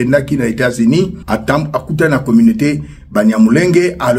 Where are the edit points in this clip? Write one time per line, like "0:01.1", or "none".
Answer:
0:01.2